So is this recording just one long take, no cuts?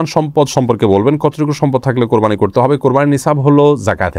yes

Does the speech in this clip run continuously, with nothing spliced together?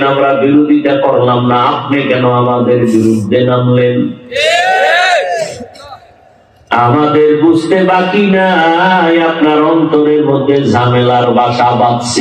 yes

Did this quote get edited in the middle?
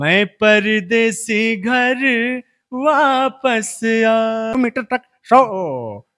yes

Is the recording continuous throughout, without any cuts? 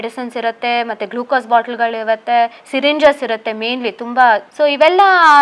no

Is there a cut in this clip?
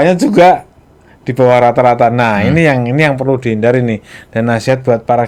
no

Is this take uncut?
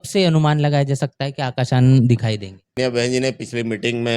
no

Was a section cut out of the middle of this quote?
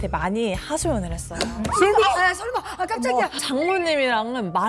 yes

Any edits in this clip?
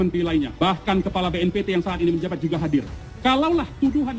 no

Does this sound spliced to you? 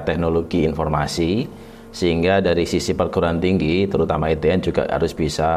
no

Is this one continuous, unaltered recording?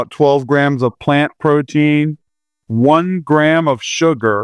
yes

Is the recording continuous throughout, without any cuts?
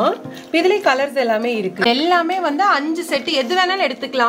no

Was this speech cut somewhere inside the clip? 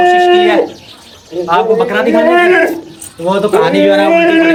no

